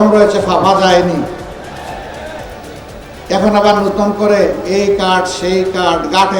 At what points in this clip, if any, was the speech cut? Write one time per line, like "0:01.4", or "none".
none

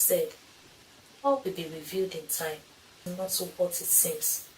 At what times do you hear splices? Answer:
0:03.0

